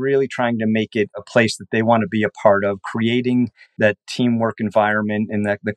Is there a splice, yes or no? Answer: yes